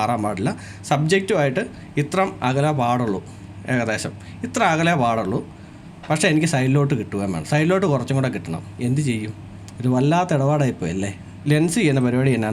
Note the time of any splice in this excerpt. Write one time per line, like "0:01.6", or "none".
0:11.4